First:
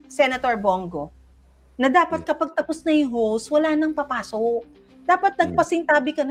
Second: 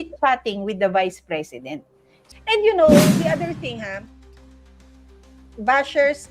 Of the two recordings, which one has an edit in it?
second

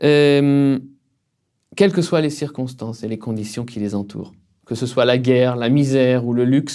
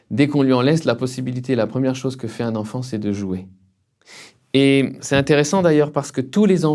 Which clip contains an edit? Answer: first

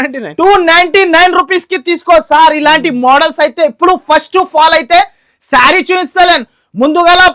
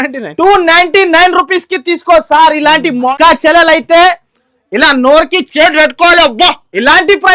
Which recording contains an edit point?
second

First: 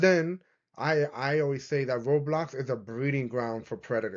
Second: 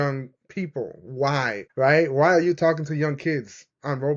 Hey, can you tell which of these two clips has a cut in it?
second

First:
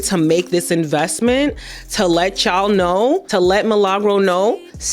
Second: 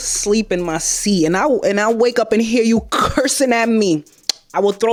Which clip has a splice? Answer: first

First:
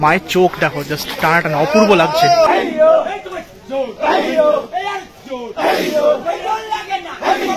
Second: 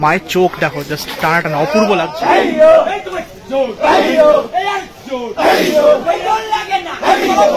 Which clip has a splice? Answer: first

